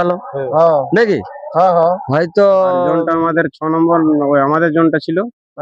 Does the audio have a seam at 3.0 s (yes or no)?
yes